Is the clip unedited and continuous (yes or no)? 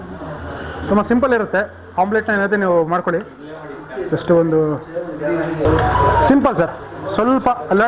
no